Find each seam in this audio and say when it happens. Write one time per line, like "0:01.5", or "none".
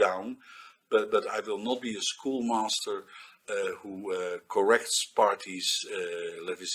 none